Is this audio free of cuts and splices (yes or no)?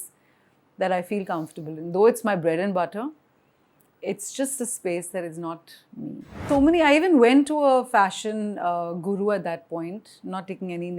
no